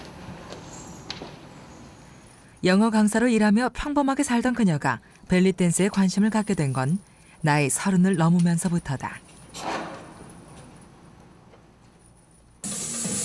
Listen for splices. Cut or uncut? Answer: uncut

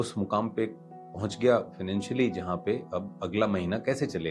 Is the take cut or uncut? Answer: uncut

